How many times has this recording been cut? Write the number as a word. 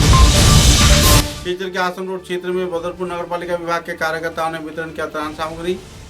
one